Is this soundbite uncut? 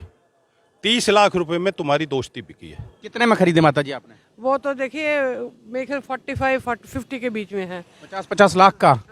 no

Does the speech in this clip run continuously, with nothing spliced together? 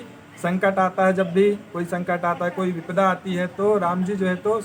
yes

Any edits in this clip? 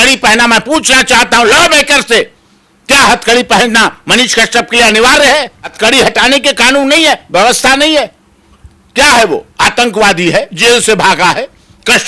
yes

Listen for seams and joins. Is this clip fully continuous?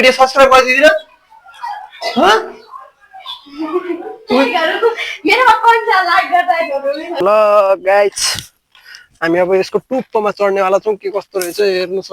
no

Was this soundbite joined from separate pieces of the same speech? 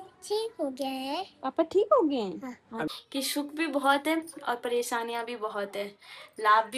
yes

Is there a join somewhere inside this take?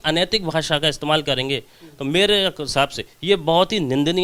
no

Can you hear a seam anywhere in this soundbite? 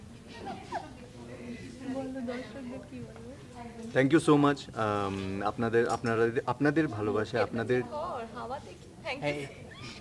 no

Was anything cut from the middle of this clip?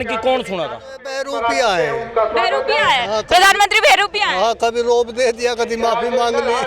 yes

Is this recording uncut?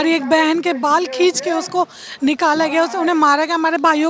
yes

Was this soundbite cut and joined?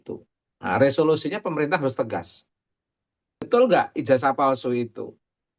yes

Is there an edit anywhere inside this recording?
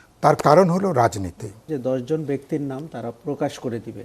yes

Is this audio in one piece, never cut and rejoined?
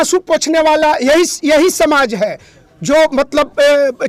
yes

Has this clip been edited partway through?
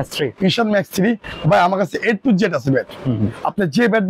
no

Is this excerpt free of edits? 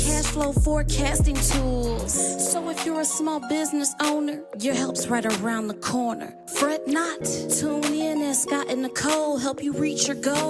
yes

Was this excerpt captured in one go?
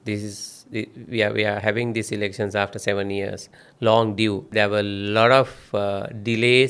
no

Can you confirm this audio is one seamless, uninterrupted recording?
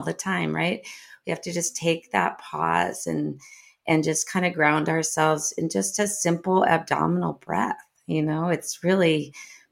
yes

